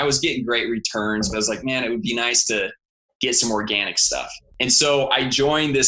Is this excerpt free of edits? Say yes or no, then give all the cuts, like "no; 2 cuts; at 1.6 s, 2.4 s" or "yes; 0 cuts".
no; 1 cut; at 4.4 s